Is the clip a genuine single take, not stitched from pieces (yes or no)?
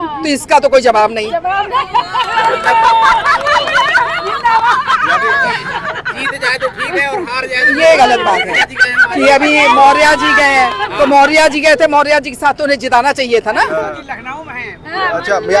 yes